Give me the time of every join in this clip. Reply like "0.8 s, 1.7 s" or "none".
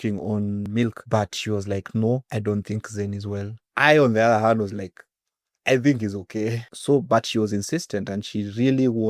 0.9 s, 2.3 s, 6.7 s